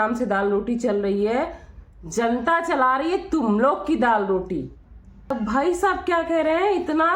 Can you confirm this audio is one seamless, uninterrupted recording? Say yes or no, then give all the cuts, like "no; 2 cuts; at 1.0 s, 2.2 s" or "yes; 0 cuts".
no; 1 cut; at 5.3 s